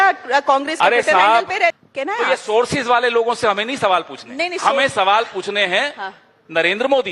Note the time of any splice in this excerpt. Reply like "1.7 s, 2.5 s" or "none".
1.8 s

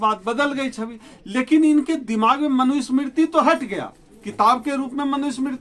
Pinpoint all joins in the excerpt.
none

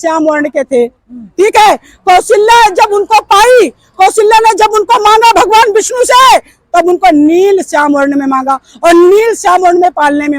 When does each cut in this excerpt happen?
none

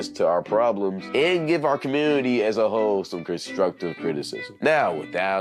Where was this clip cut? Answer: 3.5 s

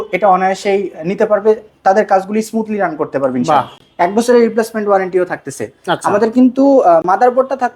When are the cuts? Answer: none

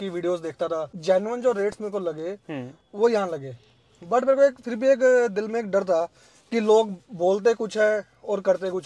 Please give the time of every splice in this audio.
0.9 s

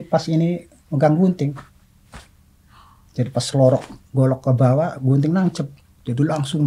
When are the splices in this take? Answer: none

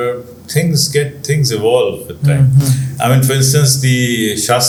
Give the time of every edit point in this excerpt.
none

